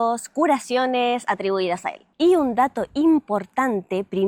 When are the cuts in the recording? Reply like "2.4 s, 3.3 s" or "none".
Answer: none